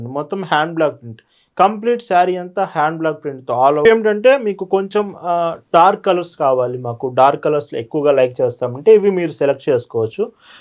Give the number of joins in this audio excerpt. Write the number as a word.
one